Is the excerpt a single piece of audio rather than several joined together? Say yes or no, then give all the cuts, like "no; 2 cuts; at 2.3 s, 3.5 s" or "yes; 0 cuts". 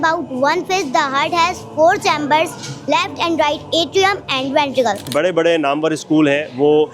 no; 1 cut; at 5.1 s